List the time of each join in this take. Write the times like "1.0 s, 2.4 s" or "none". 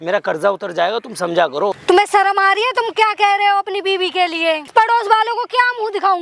1.8 s, 4.7 s